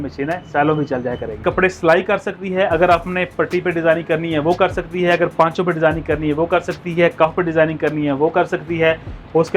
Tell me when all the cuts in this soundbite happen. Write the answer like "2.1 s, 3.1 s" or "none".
1.4 s